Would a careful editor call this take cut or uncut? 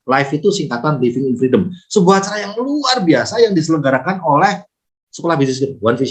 uncut